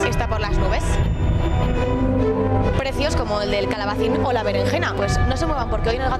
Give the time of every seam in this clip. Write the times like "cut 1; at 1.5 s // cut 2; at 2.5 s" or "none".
cut 1; at 3.7 s